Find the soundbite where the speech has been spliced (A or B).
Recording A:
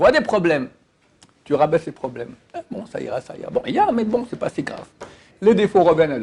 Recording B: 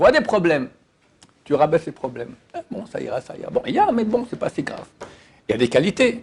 A